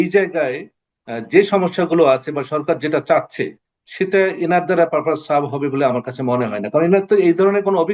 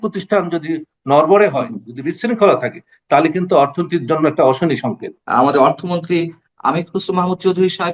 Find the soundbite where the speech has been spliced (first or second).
second